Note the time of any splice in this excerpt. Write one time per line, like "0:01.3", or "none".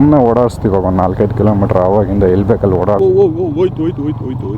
0:03.0

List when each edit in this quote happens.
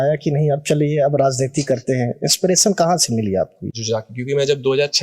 0:03.8

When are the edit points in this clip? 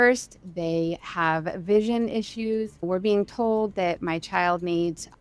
0:02.8

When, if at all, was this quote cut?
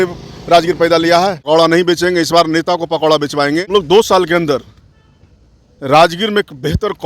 0:01.4
0:03.7

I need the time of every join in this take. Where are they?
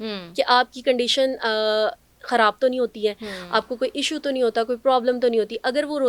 none

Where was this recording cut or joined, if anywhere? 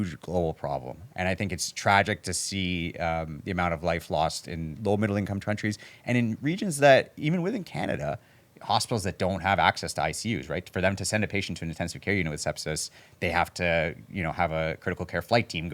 0:01.1
0:04.6

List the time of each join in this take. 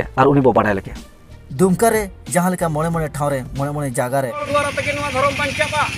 0:04.5

